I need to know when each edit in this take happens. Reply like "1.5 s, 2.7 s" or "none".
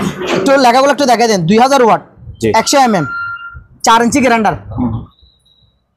5.1 s